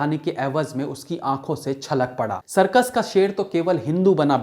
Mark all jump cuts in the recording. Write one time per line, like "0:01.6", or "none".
0:02.4